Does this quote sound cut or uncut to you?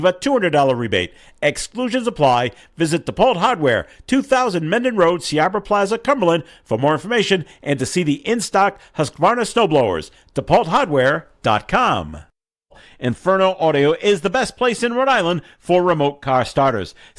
cut